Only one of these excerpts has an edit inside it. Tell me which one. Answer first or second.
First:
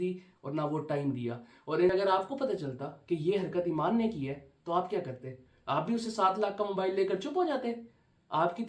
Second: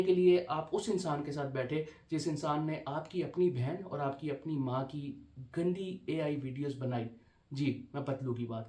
first